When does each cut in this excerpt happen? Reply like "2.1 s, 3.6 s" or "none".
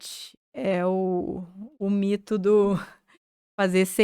none